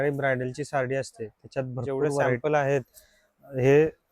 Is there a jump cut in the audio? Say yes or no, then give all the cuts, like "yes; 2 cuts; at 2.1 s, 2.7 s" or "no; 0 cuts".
yes; 1 cut; at 2.4 s